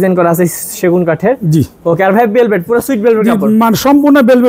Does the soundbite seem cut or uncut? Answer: uncut